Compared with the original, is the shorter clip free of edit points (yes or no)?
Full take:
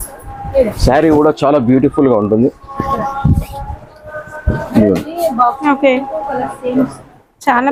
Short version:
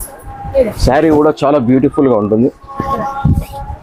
yes